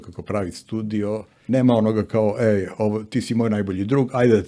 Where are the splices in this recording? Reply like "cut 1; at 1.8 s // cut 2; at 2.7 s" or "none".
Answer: cut 1; at 1.3 s

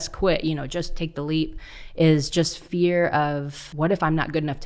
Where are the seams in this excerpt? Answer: cut 1; at 3.6 s

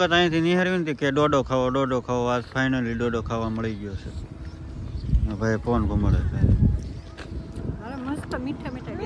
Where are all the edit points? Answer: none

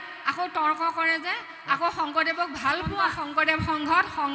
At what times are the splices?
cut 1; at 3.2 s

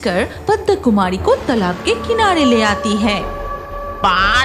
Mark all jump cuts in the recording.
cut 1; at 3.5 s

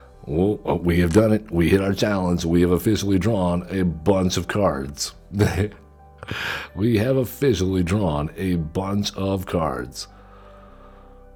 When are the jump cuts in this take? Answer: none

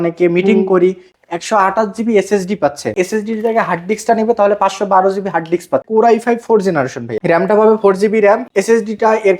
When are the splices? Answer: cut 1; at 1.1 s // cut 2; at 2.9 s // cut 3; at 5.9 s // cut 4; at 7.1 s // cut 5; at 8.5 s

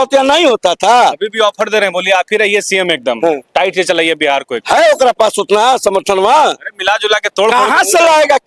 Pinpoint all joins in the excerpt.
none

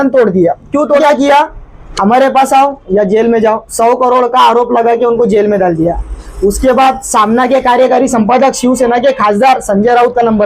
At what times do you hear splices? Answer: cut 1; at 1.0 s

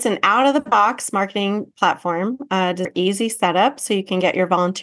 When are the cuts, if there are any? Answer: cut 1; at 2.9 s

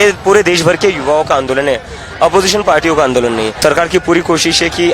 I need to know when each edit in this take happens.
cut 1; at 3.6 s

